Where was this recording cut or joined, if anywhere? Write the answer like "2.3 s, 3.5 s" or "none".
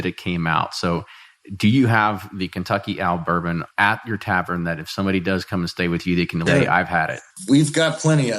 3.7 s, 6.4 s, 7.4 s